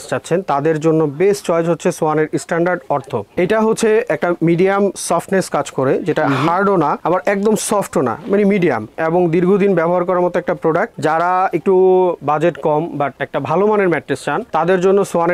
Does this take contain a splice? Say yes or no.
no